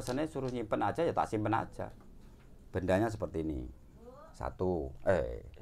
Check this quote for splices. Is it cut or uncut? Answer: uncut